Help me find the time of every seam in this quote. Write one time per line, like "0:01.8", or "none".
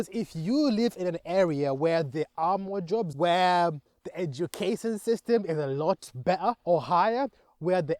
0:03.1
0:06.6